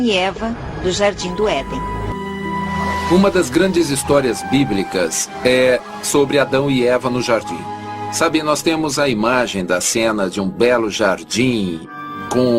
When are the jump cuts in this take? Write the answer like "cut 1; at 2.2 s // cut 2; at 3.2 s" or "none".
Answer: cut 1; at 6.8 s

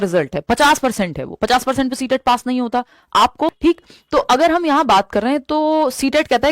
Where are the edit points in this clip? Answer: cut 1; at 3.6 s

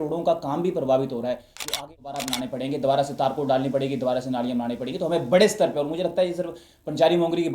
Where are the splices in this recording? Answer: cut 1; at 1.7 s

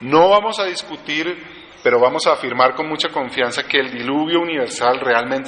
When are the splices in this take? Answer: cut 1; at 3.3 s

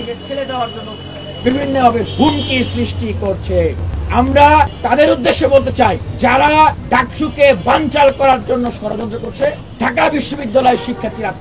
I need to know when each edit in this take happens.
none

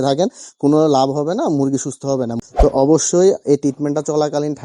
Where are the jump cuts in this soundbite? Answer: cut 1; at 2.3 s

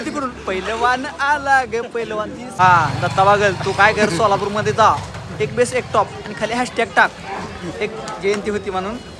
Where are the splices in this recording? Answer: cut 1; at 2.6 s

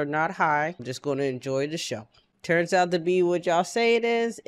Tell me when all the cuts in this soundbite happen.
none

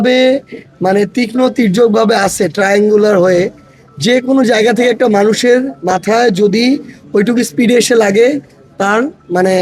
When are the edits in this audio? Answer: none

